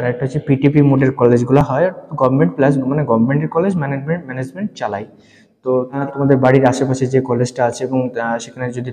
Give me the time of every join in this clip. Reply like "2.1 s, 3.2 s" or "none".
none